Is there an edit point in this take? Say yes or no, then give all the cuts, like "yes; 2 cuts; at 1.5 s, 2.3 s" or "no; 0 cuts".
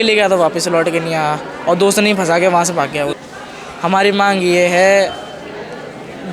yes; 1 cut; at 3.2 s